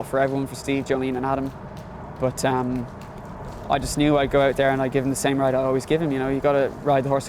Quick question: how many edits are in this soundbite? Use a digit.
0